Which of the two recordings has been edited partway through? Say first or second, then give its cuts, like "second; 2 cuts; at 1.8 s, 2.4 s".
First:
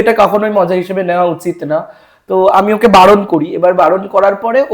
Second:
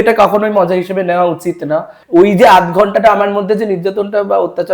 second; 1 cut; at 2.0 s